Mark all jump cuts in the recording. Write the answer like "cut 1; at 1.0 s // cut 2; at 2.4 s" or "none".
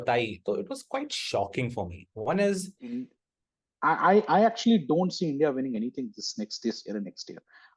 cut 1; at 2.8 s